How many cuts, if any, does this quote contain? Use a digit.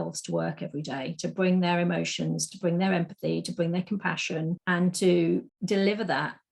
2